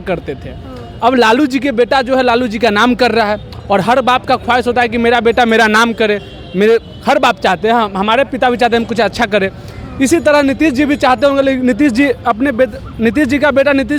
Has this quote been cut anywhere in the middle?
no; 0 cuts

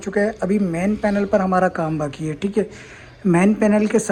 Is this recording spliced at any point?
no; 0 cuts

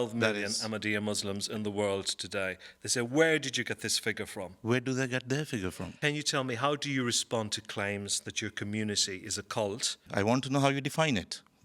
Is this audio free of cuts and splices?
no; 2 cuts; at 5.9 s, 10.1 s

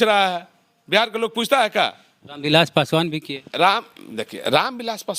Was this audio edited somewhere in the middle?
no; 0 cuts

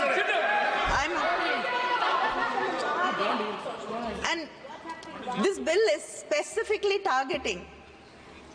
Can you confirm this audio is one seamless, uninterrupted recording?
yes; 0 cuts

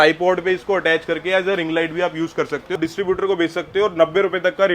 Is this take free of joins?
no; 1 cut; at 2.7 s

